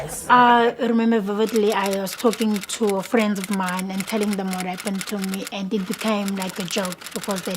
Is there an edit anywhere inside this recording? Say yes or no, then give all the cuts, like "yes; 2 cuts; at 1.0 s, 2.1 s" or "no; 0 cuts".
yes; 1 cut; at 6.5 s